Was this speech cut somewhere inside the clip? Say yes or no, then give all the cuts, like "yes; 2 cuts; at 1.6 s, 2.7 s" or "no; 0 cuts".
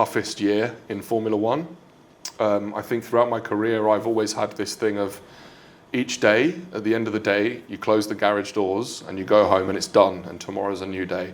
no; 0 cuts